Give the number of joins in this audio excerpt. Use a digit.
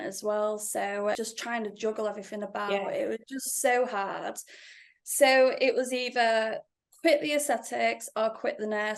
1